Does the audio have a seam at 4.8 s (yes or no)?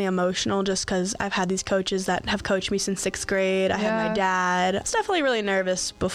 yes